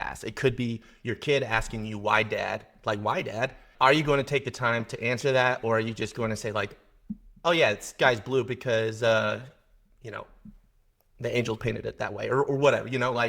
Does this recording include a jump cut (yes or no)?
yes